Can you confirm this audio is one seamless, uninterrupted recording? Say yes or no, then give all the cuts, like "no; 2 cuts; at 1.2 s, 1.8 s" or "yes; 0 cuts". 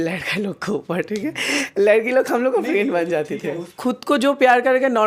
no; 1 cut; at 3.8 s